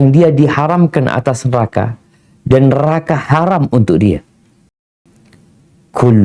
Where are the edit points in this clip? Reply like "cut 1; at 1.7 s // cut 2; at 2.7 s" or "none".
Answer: cut 1; at 5.0 s